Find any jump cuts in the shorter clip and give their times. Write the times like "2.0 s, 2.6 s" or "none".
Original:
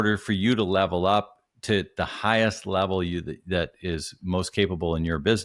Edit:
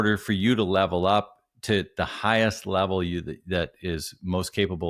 none

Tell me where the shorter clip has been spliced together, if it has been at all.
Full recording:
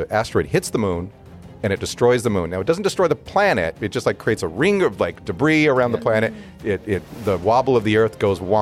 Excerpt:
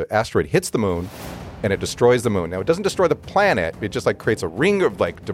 none

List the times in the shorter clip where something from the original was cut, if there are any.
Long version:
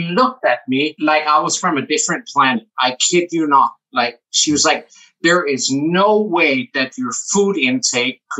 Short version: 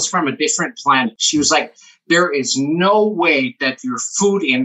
1.2 s

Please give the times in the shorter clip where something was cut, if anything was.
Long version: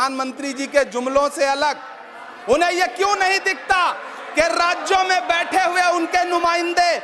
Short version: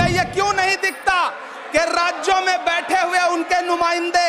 none

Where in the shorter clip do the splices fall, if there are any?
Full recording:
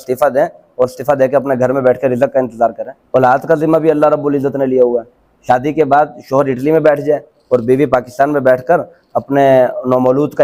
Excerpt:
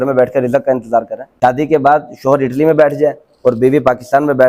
1.2 s

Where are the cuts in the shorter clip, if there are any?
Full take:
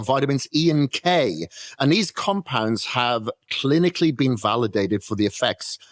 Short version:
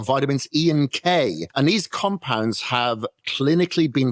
1.4 s

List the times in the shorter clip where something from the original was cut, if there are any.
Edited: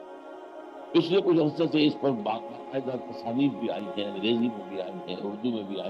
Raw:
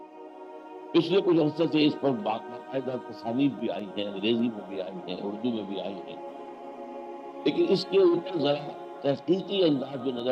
none

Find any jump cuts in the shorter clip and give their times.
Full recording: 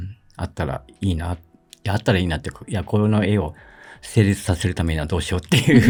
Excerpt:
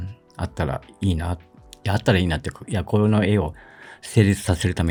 none

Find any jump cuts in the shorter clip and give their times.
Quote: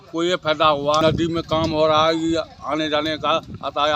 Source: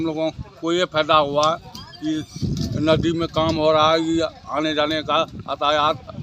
1.0 s

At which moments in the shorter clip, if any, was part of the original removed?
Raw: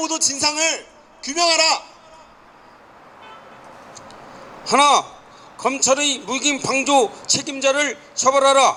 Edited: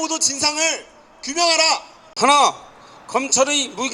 2.0 s

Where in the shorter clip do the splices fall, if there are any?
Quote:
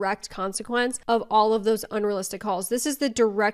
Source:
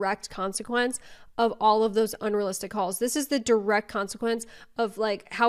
1.0 s

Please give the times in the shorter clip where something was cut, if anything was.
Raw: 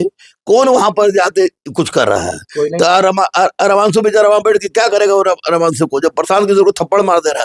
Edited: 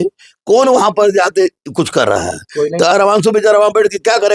2.9 s

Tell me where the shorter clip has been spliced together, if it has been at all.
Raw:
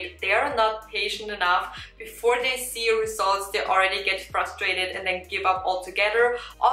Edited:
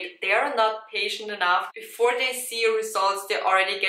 1.8 s

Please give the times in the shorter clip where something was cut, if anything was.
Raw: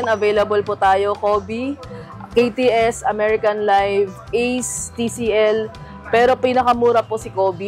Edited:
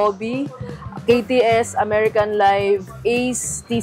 none

